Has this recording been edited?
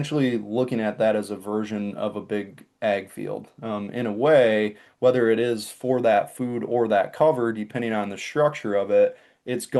no; 0 cuts

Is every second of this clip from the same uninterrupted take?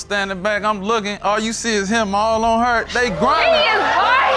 yes; 0 cuts

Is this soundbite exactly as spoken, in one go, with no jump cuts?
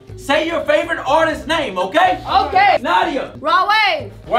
no; 1 cut; at 2.8 s

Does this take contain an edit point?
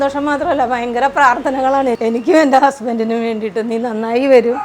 yes; 1 cut; at 2.0 s

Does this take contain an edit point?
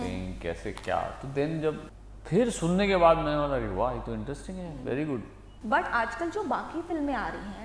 yes; 2 cuts; at 1.9 s, 5.5 s

